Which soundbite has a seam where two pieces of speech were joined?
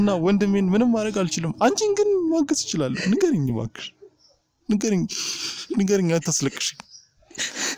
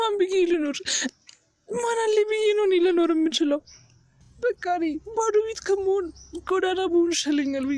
second; 1 cut; at 4.2 s

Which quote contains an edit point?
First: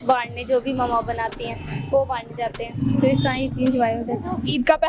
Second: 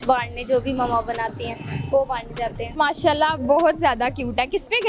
second; 1 cut; at 2.7 s

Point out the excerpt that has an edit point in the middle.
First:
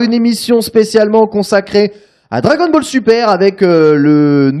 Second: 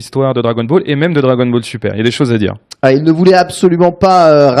second; 1 cut; at 1.1 s

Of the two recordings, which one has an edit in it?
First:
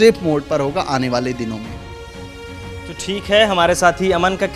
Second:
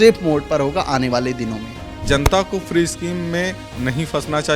second; 1 cut; at 2.0 s

